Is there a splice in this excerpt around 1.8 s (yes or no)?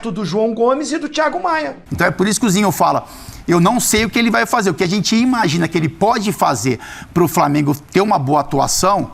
yes